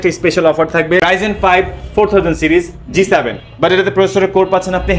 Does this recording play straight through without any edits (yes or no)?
no